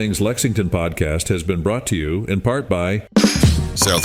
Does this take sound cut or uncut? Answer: cut